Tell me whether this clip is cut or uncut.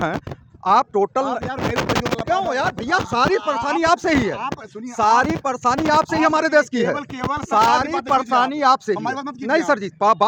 uncut